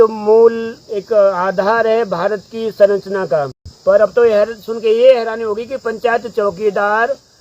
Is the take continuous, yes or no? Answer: no